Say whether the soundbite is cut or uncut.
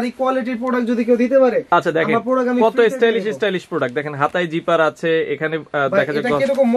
uncut